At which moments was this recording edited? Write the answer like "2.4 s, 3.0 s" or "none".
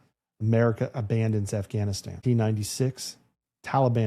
2.2 s